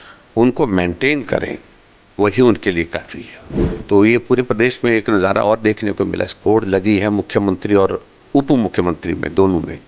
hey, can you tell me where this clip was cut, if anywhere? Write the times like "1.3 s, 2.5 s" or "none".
3.2 s, 6.3 s